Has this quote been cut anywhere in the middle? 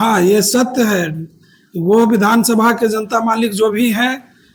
no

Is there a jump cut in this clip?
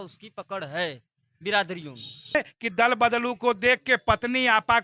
yes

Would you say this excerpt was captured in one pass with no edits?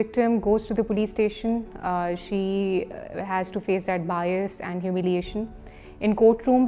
yes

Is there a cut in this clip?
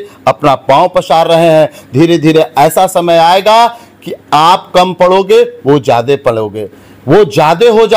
no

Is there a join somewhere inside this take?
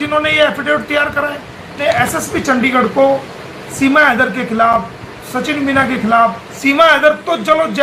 yes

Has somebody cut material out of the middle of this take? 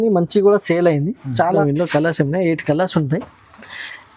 yes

